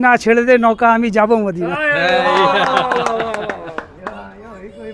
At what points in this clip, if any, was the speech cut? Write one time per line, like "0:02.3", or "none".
none